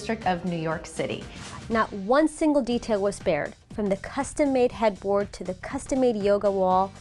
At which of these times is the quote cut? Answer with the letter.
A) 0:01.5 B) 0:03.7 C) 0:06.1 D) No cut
A